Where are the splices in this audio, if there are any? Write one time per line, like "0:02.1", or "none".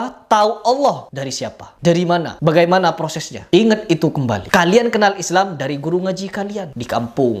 none

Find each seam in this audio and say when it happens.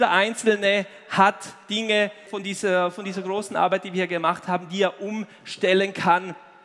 0:02.3

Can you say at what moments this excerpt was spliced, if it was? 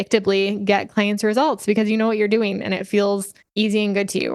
0:03.4

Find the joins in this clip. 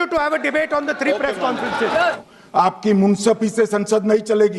0:02.2

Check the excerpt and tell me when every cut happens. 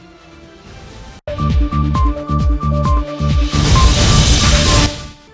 0:01.2

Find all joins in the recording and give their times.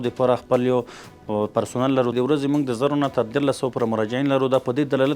0:02.1

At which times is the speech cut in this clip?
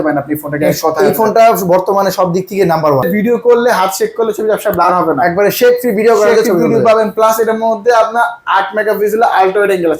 0:03.1

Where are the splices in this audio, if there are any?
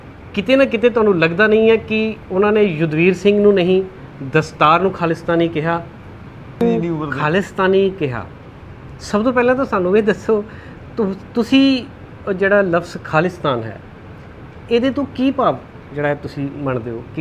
0:06.6

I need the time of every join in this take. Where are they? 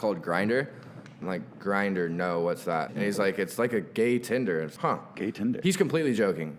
0:01.2
0:02.9
0:04.7

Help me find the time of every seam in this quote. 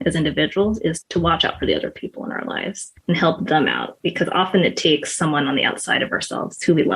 0:01.0
0:02.9

